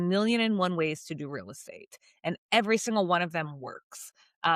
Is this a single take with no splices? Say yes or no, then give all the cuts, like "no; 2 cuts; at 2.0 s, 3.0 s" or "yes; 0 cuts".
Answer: yes; 0 cuts